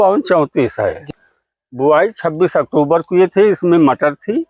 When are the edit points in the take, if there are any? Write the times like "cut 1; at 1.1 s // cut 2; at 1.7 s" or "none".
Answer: cut 1; at 1.1 s